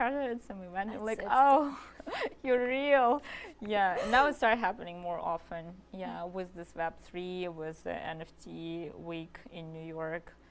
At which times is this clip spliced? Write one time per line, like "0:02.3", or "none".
none

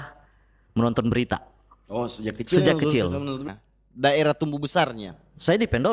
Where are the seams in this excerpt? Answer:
0:03.4

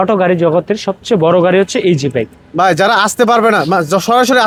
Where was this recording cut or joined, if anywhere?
none

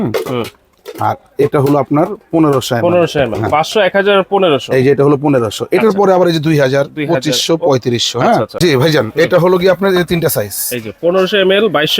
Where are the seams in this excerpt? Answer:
0:08.6

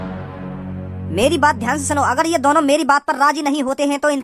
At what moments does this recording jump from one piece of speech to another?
none

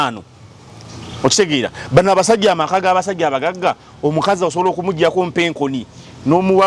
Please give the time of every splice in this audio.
none

